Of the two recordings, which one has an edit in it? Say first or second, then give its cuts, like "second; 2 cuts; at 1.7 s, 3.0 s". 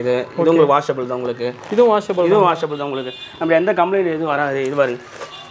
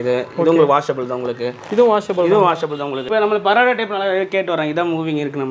second; 1 cut; at 3.1 s